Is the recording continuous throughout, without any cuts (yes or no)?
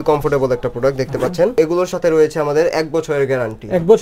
no